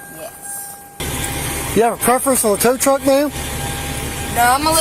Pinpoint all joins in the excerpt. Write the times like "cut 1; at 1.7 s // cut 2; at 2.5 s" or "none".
cut 1; at 1.0 s